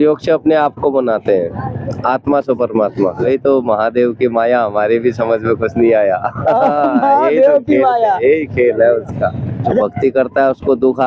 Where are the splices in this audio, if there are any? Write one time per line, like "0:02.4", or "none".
0:03.3
0:09.8